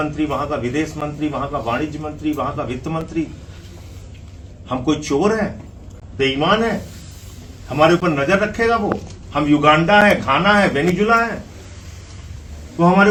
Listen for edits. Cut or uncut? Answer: uncut